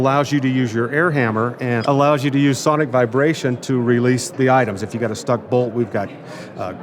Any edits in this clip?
yes; 1 cut; at 4.3 s

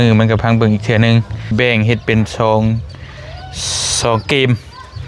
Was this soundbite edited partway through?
yes; 1 cut; at 1.5 s

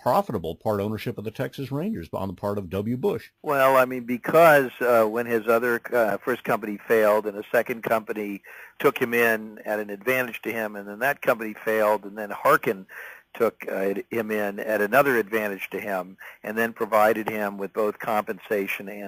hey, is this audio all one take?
yes; 0 cuts

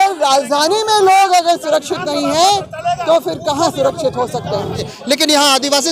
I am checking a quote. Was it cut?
yes; 1 cut; at 4.9 s

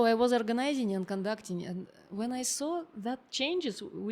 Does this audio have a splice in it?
no; 0 cuts

